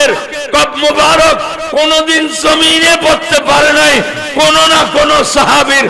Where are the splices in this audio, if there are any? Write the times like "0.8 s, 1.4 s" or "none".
none